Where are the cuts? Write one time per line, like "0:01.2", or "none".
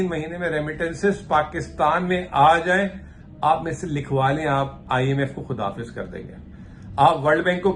none